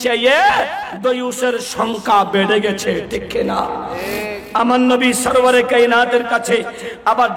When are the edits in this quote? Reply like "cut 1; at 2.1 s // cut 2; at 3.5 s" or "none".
cut 1; at 4.4 s